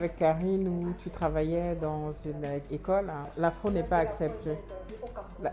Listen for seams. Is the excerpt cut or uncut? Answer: cut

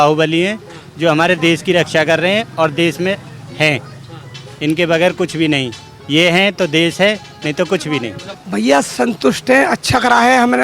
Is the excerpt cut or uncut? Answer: cut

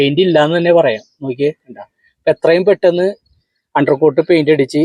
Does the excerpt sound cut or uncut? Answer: uncut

